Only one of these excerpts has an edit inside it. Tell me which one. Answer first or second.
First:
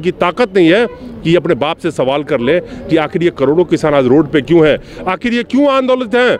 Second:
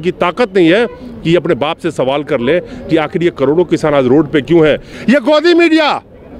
second